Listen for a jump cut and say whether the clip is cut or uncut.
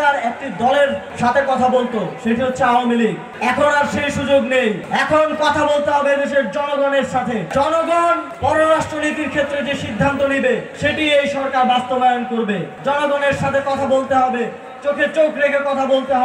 cut